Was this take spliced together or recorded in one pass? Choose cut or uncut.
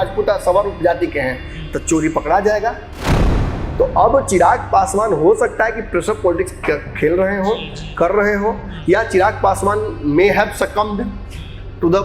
cut